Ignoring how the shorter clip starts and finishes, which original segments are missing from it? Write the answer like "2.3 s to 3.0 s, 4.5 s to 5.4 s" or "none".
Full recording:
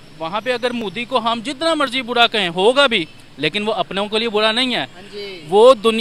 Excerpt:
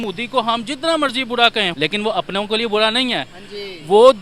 2.5 s to 3.3 s

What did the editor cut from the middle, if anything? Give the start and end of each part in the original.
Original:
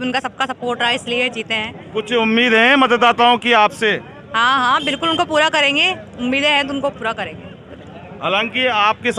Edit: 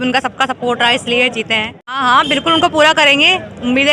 1.9 s to 4.5 s

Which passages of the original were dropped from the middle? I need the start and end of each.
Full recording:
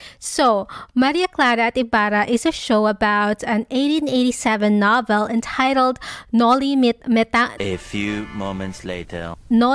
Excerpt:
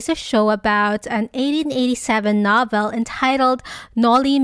none

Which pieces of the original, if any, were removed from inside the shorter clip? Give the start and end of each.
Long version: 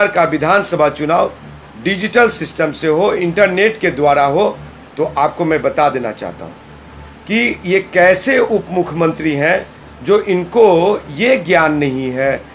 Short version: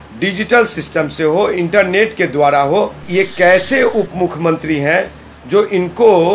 4.7 s to 7.6 s

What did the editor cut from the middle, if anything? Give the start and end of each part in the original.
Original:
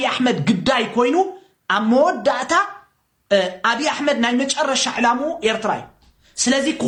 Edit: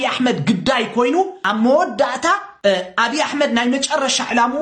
1.4 s to 1.7 s, 2.8 s to 3.2 s

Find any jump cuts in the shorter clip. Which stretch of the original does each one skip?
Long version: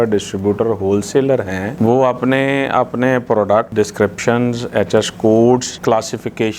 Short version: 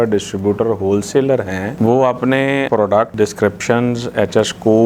2.7 s to 3.2 s

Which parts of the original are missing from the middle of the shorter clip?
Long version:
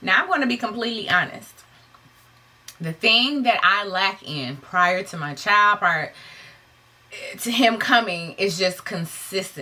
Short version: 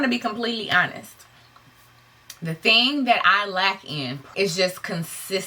4.6 s to 8.3 s

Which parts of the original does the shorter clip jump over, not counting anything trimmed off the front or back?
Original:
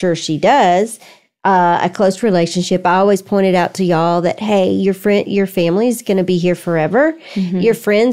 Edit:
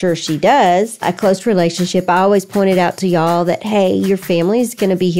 1.1 s to 1.9 s, 5.0 s to 5.5 s

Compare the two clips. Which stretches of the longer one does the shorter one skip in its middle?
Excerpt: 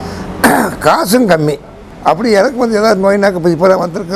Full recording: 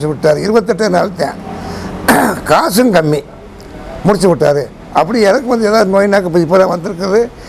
3.5 s to 4.8 s

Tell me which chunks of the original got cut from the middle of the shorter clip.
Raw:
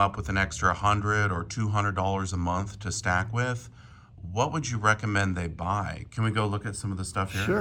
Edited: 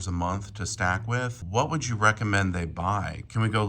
3.6 s to 4.2 s

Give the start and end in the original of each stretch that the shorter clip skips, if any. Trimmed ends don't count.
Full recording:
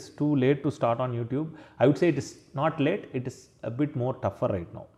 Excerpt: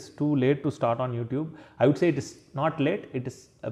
none

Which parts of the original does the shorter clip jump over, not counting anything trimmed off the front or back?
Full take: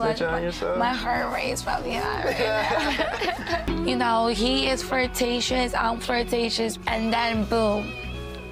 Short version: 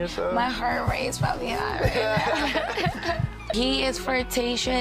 3.9 s to 4.3 s

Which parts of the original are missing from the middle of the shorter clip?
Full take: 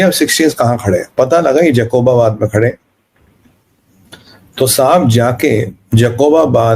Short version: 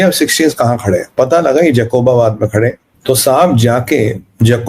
2.9 s to 4.4 s

